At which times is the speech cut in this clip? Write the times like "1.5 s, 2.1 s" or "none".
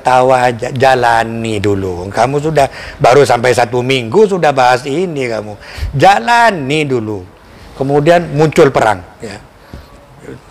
7.4 s